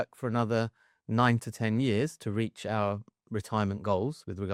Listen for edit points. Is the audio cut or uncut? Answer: uncut